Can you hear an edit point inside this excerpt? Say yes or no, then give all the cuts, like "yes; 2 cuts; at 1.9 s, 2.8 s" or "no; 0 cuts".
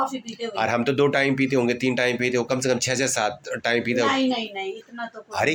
no; 0 cuts